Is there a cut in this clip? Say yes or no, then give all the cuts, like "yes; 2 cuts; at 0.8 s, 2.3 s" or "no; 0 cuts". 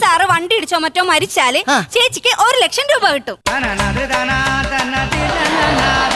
yes; 1 cut; at 3.3 s